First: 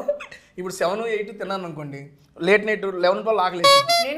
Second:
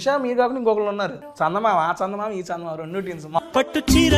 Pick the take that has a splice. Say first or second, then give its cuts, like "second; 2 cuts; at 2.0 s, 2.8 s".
second; 2 cuts; at 1.2 s, 3.4 s